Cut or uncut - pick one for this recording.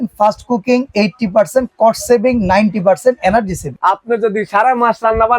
cut